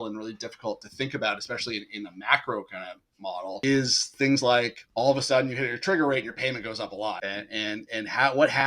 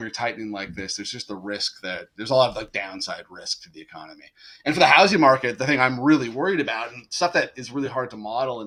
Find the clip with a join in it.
first; 3 cuts; at 3.6 s, 4.8 s, 7.2 s

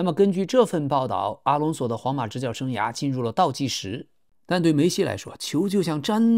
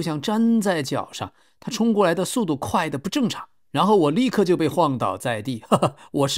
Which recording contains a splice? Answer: first; 1 cut; at 4.3 s

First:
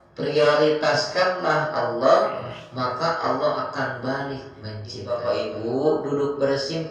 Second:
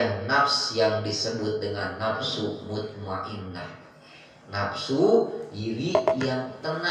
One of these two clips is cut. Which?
first; 1 cut; at 5.0 s

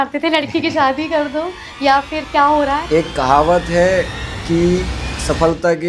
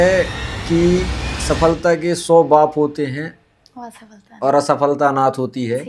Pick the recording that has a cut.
first; 1 cut; at 2.8 s

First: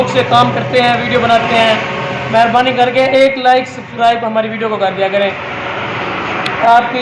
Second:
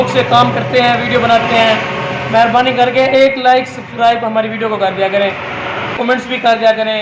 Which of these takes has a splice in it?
second; 1 cut; at 6.0 s

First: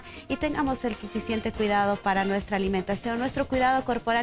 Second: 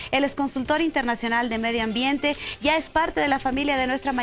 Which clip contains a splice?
second; 1 cut; at 1.5 s

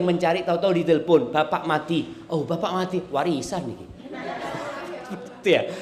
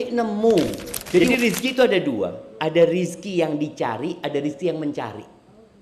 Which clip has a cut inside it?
second; 1 cut; at 1.2 s

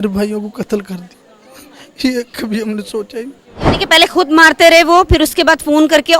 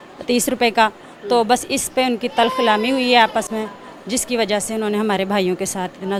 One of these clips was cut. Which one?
first; 1 cut; at 3.7 s

